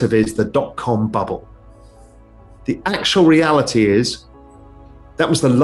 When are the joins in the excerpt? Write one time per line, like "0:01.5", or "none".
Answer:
none

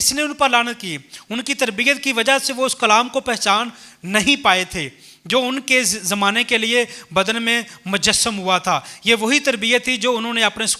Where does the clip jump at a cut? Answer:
none

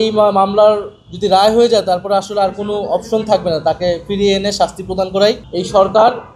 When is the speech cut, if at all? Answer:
0:05.5

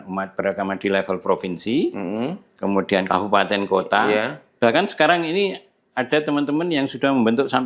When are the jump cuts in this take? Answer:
none

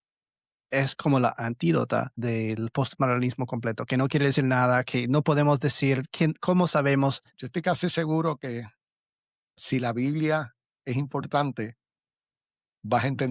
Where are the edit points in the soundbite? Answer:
0:01.3
0:02.1
0:07.3

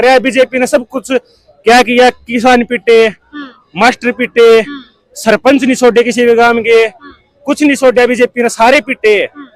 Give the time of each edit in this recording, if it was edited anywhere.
none

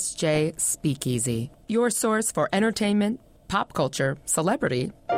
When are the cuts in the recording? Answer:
none

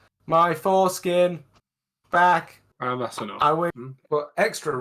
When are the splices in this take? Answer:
0:03.7

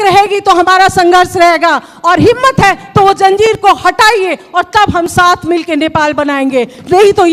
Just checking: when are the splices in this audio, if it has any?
none

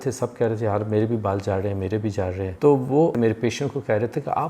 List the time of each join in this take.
0:02.5
0:03.1

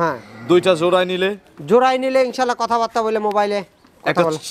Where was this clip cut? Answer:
none

